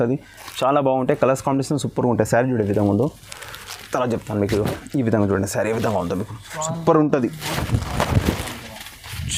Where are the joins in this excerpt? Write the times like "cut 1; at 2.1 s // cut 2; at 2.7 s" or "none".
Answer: none